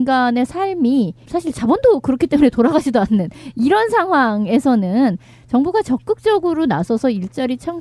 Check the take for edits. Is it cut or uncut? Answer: uncut